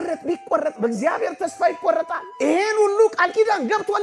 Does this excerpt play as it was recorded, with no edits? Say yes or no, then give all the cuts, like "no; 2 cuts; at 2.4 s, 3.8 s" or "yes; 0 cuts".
no; 1 cut; at 2.2 s